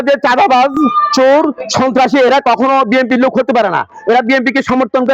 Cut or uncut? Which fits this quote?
uncut